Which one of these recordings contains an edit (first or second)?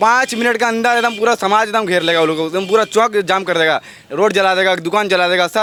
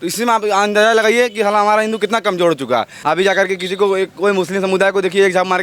second